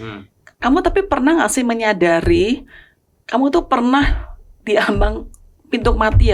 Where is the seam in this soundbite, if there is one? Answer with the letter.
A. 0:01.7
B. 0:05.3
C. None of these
C